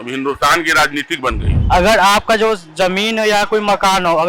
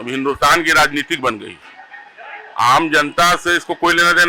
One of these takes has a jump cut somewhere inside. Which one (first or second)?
first